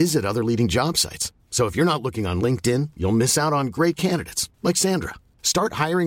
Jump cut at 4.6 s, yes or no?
no